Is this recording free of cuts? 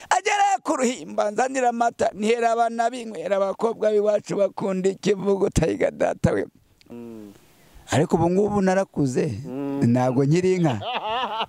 no; 1 cut; at 6.8 s

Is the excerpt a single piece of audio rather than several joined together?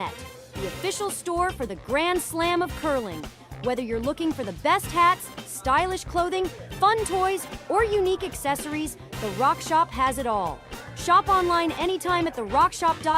yes; 0 cuts

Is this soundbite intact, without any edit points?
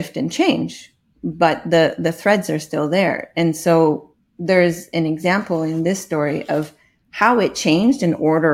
yes; 0 cuts

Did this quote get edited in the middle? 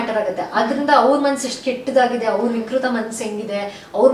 no; 0 cuts

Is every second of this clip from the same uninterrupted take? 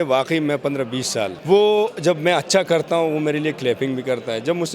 no; 1 cut; at 1.4 s

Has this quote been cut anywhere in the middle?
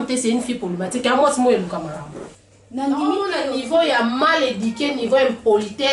yes; 1 cut; at 3.3 s

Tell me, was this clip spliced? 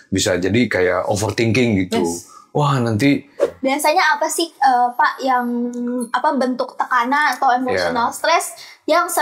yes; 1 cut; at 3.4 s

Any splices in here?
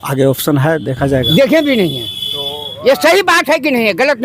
yes; 1 cut; at 1.3 s

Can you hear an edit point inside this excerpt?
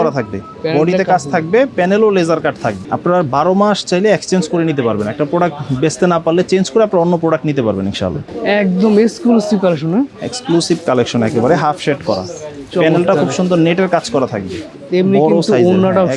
yes; 3 cuts; at 2.8 s, 8.2 s, 14.7 s

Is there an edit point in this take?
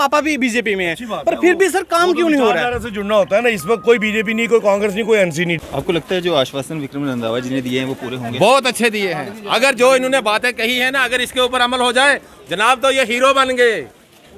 yes; 1 cut; at 5.6 s

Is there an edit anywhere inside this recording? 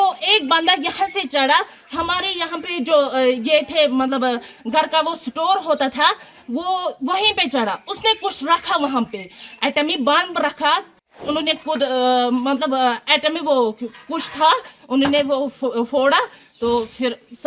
yes; 1 cut; at 11.2 s

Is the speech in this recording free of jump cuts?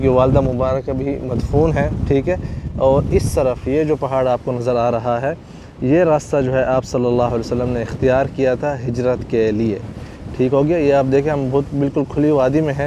yes; 0 cuts

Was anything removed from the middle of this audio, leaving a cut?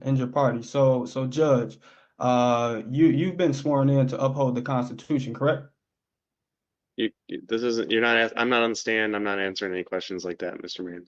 no; 0 cuts

